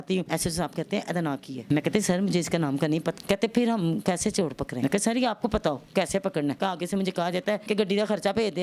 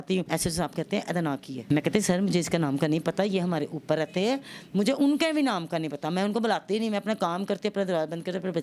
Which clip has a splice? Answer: first; 4 cuts; at 3.1 s, 4.7 s, 6.6 s, 7.6 s

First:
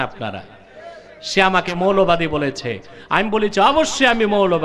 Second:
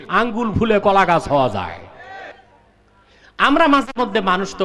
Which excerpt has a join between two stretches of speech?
second; 1 cut; at 2.3 s

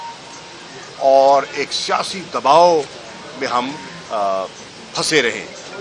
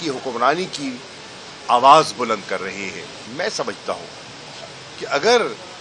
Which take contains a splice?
second; 1 cut; at 3.2 s

